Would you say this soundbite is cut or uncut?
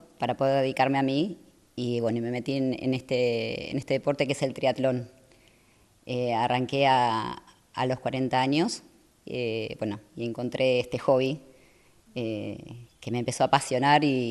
uncut